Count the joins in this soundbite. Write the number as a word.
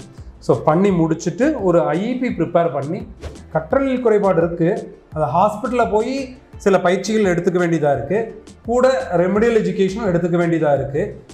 one